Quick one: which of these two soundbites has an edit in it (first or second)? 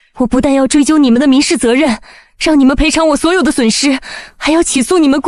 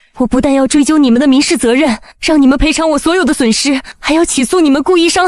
second